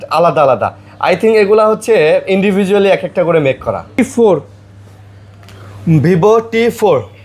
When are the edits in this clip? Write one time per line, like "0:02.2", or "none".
0:04.0